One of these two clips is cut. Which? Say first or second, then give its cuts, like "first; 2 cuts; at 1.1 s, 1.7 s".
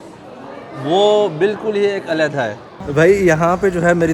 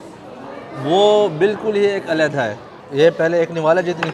first; 1 cut; at 2.8 s